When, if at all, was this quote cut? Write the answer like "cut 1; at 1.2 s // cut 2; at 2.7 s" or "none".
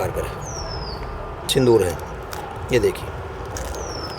cut 1; at 1.5 s

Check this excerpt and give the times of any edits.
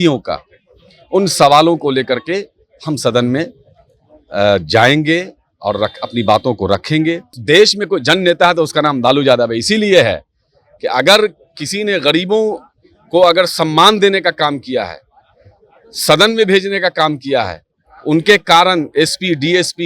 cut 1; at 7.4 s

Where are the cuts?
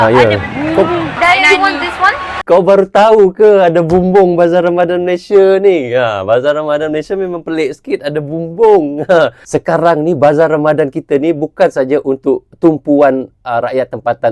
cut 1; at 2.3 s // cut 2; at 9.4 s

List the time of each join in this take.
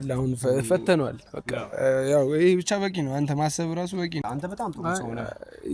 cut 1; at 4.2 s

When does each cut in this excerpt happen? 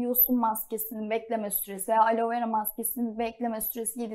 none

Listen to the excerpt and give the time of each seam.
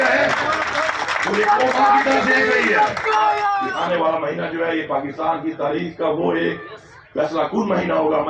cut 1; at 3.6 s

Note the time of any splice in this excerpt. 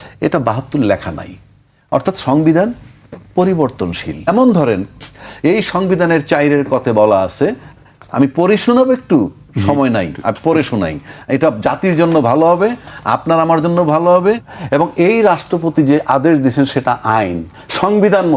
cut 1; at 4.3 s // cut 2; at 14.5 s

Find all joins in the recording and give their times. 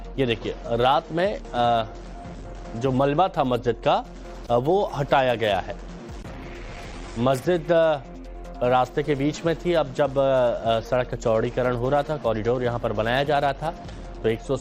none

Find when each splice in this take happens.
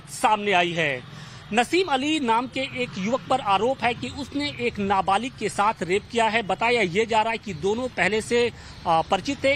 none

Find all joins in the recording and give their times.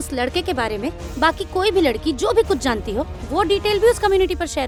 none

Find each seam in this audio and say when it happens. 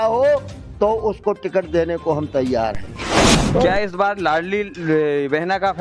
cut 1; at 3.3 s

